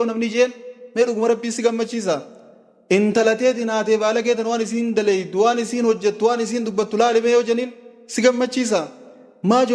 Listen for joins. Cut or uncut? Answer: uncut